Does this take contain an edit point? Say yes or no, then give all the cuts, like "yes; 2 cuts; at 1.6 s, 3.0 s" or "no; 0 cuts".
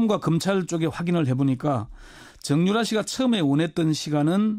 yes; 1 cut; at 3.1 s